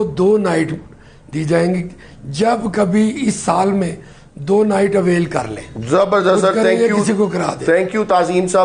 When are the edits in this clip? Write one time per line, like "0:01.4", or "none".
none